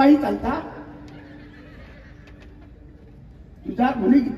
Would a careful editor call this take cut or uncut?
uncut